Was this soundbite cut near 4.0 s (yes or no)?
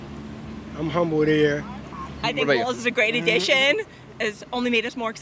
no